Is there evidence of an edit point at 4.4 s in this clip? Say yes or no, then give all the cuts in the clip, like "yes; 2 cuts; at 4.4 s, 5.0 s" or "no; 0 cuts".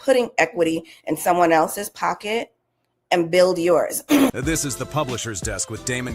yes; 1 cut; at 4.4 s